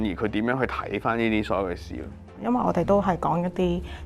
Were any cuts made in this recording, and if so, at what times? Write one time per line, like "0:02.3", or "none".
0:02.4